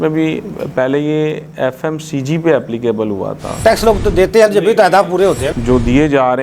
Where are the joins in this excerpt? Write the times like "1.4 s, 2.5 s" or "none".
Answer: 3.6 s, 5.5 s